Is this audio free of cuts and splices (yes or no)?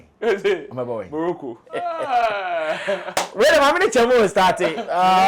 no